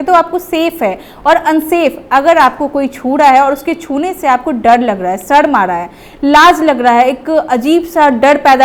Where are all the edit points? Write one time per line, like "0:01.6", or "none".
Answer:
none